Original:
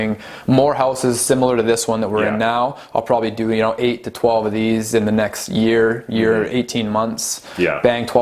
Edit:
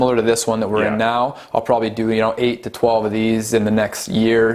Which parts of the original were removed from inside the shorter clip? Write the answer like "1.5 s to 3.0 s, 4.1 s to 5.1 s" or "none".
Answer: none